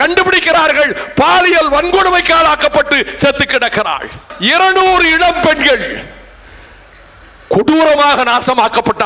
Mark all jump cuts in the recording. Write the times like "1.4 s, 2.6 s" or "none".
4.3 s